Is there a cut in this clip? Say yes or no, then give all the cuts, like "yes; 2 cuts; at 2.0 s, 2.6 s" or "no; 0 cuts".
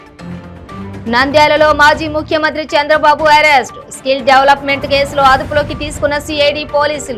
yes; 1 cut; at 0.9 s